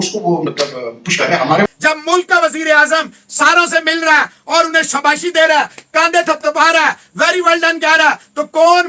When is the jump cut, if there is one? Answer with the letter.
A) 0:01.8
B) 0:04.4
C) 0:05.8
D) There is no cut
A